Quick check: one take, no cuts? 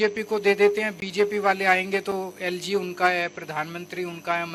yes; 0 cuts

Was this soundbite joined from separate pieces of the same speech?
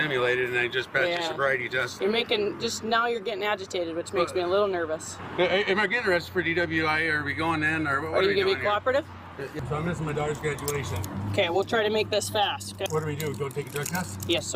yes; 4 cuts; at 1.9 s, 5.2 s, 9.5 s, 12.9 s

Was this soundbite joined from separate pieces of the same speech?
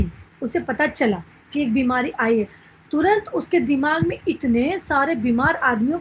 no; 0 cuts

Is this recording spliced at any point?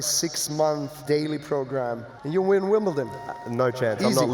yes; 2 cuts; at 1.0 s, 2.1 s

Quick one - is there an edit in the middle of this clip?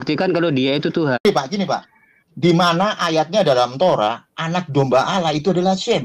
yes; 1 cut; at 1.2 s

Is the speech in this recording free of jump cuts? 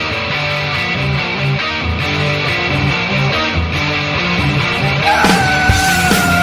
no; 1 cut; at 3.2 s

